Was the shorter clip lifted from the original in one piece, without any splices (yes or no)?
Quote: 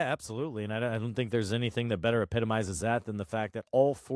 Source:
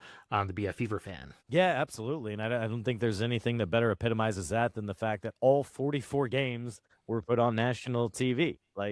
yes